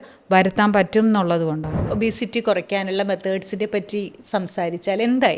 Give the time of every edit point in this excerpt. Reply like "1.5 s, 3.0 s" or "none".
1.8 s

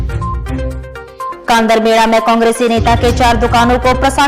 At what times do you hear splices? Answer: 1.3 s

